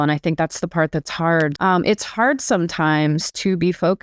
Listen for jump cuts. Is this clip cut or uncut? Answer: cut